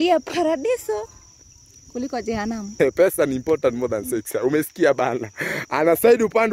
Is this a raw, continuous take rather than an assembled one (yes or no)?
no